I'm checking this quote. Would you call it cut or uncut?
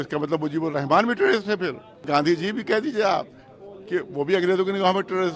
cut